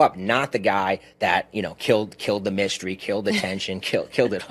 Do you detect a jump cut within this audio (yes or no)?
yes